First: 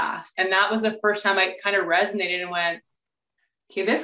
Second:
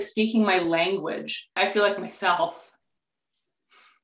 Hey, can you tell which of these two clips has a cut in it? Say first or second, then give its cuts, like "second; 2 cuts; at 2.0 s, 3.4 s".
second; 1 cut; at 1.5 s